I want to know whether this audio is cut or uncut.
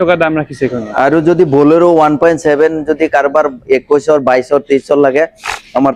uncut